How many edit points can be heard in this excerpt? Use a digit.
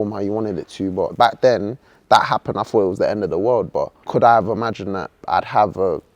3